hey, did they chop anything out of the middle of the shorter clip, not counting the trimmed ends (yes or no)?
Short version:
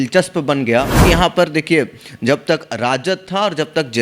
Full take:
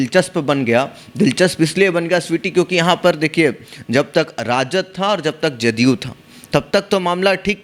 yes